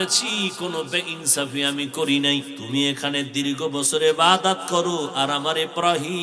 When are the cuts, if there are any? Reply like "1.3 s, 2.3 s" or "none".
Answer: 2.6 s